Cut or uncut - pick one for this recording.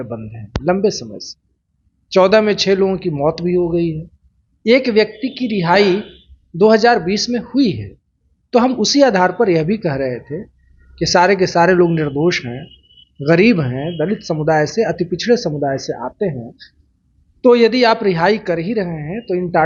uncut